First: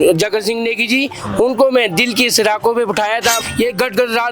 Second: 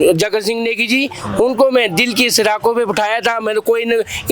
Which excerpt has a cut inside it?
first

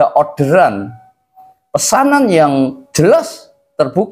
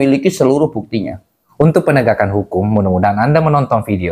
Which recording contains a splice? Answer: second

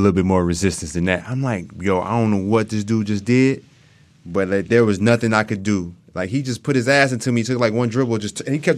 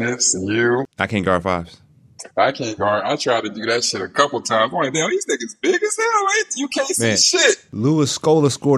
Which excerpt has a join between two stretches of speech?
second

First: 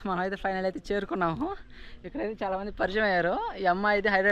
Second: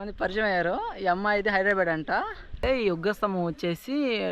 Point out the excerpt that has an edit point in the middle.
second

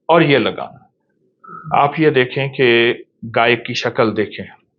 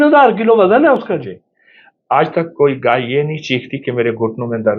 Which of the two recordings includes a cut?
first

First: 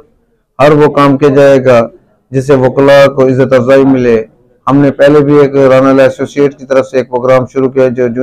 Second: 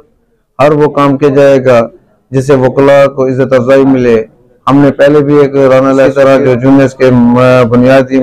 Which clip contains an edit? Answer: second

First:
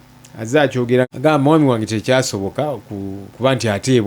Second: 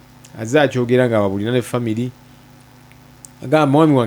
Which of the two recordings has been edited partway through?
first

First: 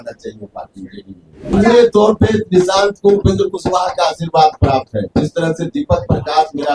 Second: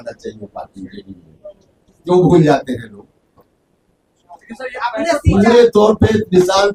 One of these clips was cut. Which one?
first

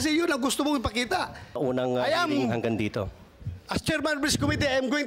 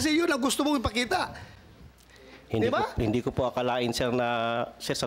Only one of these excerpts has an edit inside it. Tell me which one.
first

